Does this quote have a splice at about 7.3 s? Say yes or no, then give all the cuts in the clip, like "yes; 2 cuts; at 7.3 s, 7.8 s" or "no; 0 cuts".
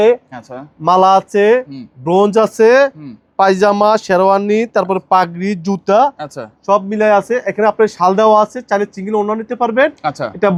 no; 0 cuts